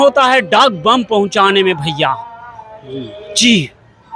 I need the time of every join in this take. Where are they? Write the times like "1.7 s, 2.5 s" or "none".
none